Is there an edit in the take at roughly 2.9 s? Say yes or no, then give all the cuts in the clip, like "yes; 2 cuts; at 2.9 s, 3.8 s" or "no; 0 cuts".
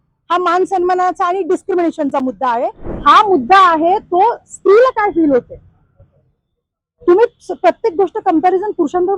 yes; 1 cut; at 2.9 s